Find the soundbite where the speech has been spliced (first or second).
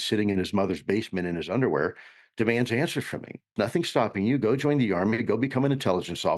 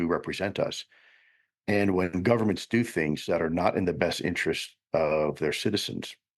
first